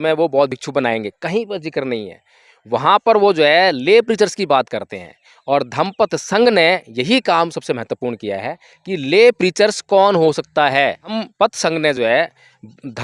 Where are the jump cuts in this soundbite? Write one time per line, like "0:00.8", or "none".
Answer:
0:11.2